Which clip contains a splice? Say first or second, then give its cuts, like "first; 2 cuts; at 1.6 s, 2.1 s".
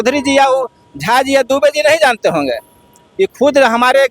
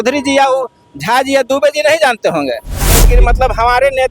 second; 1 cut; at 3.0 s